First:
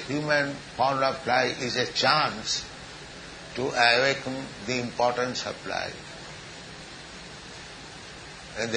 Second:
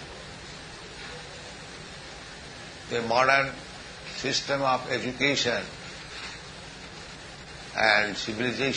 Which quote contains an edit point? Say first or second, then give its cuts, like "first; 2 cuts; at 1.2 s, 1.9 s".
first; 1 cut; at 5.1 s